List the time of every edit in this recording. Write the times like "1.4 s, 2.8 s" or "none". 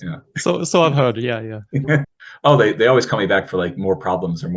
2.1 s